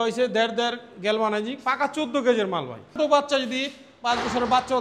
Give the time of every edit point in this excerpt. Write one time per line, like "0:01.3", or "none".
0:03.0

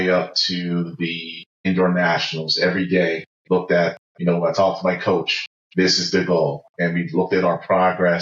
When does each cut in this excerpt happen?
0:01.7
0:04.1

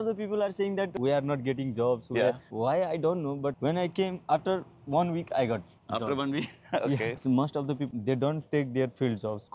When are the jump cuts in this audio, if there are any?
0:00.9
0:02.5
0:03.6
0:07.2

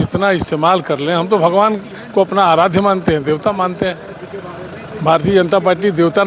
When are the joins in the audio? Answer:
none

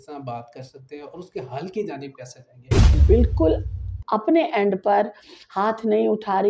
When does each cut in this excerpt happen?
0:03.0

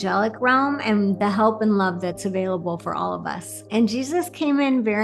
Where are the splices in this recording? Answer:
0:03.6

